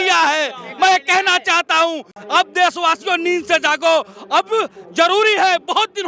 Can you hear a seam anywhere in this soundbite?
no; 0 cuts

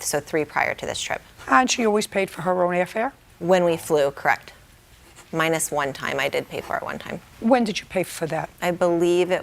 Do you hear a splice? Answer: yes; 3 cuts; at 1.3 s, 3.2 s, 7.5 s

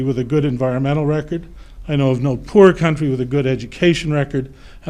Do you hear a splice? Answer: no; 0 cuts

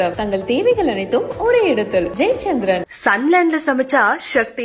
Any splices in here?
no; 0 cuts

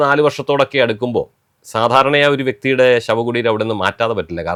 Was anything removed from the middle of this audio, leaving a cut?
no; 0 cuts

